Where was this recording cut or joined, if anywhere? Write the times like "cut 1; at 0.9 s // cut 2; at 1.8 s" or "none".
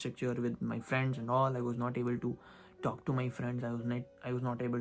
none